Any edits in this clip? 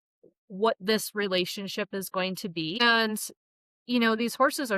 yes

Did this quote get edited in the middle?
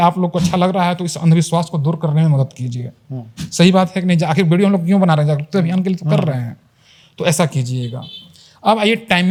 no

